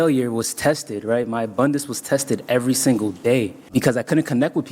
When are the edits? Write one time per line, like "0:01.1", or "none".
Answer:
0:03.7